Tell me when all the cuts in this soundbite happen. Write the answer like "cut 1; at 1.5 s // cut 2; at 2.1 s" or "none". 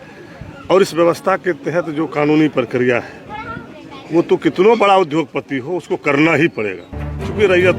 none